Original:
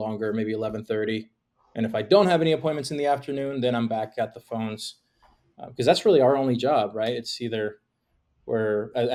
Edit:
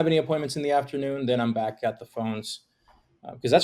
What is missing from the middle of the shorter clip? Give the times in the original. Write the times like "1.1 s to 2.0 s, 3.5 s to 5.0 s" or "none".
none